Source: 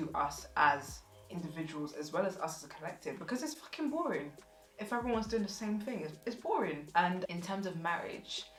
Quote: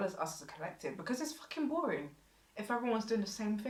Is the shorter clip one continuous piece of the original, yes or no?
yes